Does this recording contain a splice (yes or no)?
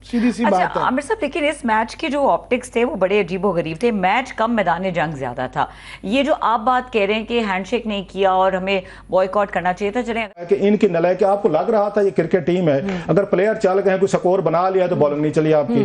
yes